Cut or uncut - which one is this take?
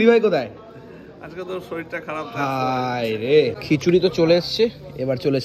cut